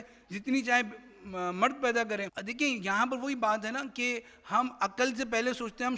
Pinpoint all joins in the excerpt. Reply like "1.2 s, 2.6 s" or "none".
2.4 s